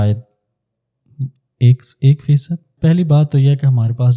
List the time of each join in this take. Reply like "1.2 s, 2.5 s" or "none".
2.7 s